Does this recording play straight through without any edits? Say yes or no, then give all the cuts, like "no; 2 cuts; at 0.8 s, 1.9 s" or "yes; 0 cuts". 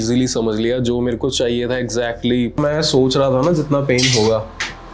no; 1 cut; at 2.6 s